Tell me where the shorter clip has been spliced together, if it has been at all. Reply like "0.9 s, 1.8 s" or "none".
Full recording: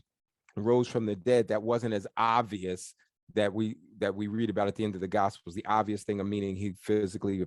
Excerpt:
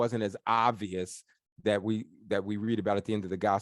none